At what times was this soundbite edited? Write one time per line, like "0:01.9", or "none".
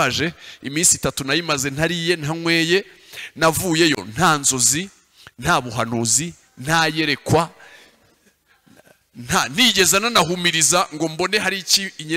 none